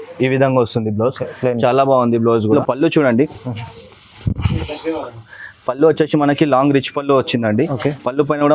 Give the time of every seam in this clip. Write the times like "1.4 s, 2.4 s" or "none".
2.5 s

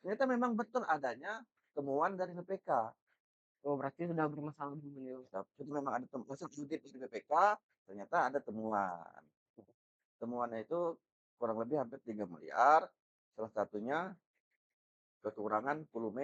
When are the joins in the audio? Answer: none

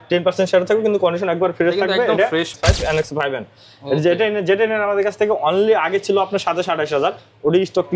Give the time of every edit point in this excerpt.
2.6 s

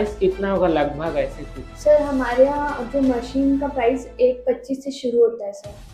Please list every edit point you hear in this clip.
none

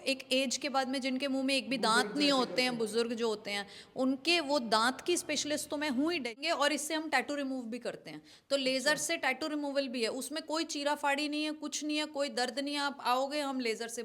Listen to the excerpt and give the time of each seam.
6.4 s

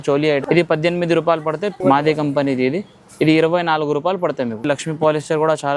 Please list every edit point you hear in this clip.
1.7 s, 4.6 s

